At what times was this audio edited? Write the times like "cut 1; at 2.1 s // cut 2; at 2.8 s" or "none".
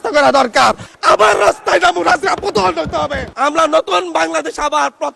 cut 1; at 0.9 s // cut 2; at 3.3 s